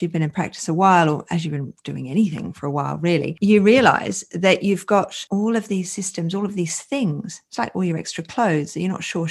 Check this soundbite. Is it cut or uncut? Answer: uncut